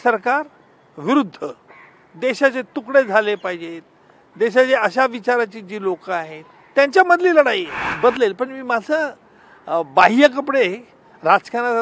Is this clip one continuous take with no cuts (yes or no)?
no